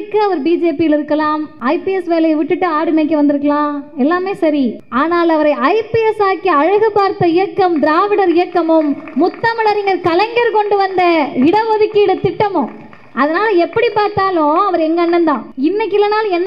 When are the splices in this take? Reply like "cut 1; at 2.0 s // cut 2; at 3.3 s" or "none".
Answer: cut 1; at 1.5 s // cut 2; at 4.8 s // cut 3; at 15.5 s